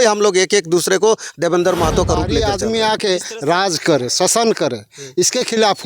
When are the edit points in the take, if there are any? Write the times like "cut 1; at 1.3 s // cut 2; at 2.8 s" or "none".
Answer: cut 1; at 2.4 s